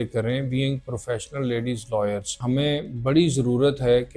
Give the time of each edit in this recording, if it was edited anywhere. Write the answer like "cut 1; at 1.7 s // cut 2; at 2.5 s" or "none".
cut 1; at 2.3 s